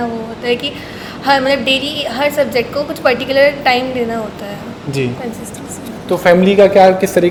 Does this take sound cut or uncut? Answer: uncut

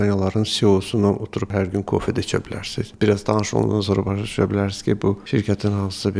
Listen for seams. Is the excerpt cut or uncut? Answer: cut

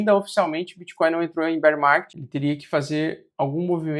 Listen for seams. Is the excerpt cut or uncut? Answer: cut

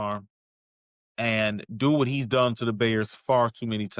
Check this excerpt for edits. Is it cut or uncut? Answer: uncut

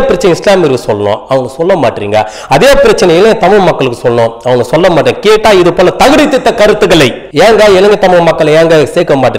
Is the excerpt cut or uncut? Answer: uncut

